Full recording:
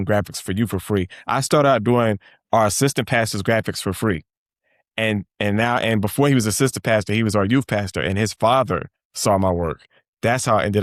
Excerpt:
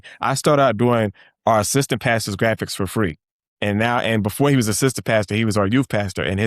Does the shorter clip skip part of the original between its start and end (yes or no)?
yes